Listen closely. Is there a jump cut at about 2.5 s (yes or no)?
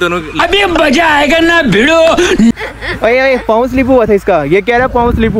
yes